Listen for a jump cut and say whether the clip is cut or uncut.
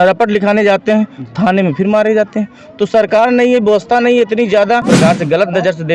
cut